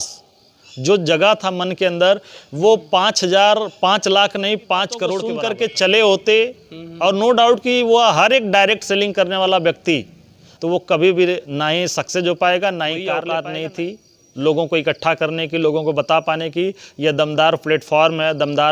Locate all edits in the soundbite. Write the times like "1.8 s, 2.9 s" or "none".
5.3 s, 10.5 s, 13.0 s